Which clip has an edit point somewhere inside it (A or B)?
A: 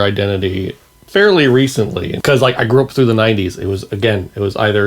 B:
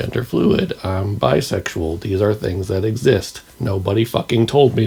A